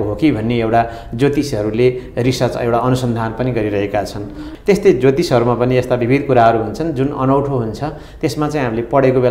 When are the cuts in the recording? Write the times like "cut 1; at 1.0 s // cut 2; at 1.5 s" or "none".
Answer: none